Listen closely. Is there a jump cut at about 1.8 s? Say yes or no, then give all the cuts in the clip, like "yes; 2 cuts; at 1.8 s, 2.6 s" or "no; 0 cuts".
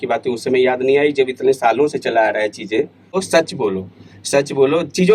no; 1 cut; at 3.1 s